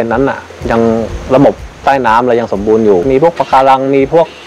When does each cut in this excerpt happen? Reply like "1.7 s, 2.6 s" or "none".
1.7 s, 3.1 s